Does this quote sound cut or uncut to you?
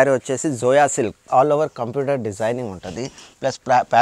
cut